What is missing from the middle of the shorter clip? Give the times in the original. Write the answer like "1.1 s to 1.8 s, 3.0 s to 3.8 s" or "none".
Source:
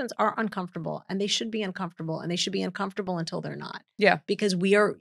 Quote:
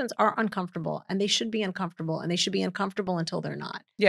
none